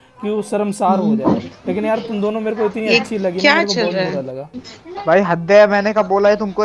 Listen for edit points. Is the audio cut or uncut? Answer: uncut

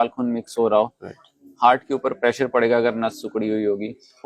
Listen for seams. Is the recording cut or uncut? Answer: uncut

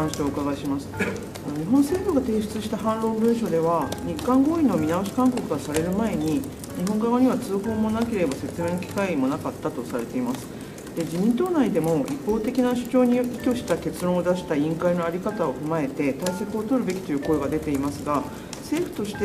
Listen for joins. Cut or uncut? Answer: cut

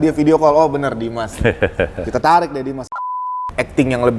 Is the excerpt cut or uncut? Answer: cut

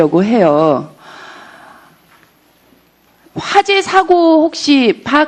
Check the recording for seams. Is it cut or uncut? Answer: uncut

